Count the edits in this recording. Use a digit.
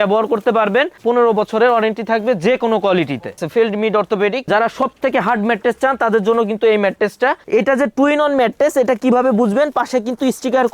3